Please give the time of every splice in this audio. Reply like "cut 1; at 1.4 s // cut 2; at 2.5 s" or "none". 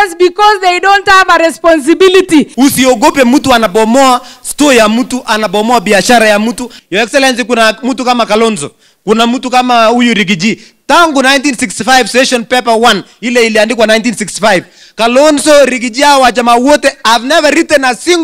cut 1; at 2.5 s // cut 2; at 6.8 s